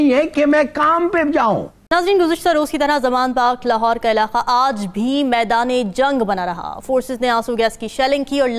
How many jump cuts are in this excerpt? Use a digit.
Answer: 1